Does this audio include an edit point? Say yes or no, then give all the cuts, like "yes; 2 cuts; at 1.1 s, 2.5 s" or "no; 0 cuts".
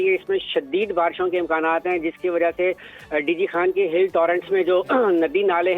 no; 0 cuts